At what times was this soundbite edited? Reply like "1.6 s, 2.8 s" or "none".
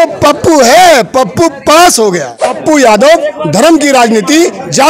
2.4 s